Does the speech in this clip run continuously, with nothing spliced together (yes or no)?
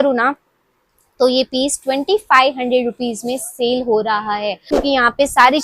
no